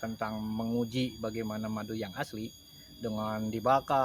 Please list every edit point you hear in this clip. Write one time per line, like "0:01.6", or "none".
none